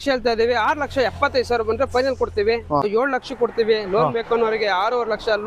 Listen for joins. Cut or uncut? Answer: cut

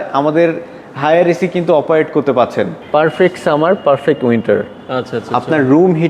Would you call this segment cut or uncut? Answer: cut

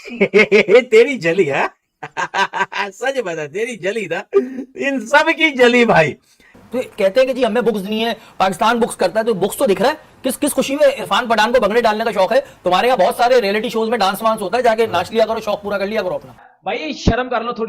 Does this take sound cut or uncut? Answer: cut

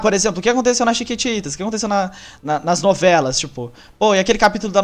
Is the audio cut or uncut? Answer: uncut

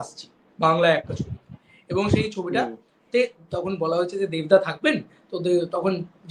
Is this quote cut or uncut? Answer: uncut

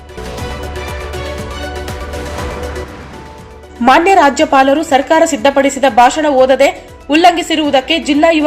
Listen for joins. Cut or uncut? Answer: cut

